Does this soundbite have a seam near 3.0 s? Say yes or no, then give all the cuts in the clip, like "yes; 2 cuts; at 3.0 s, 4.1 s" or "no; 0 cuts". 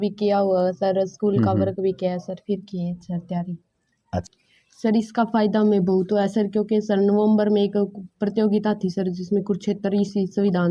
no; 0 cuts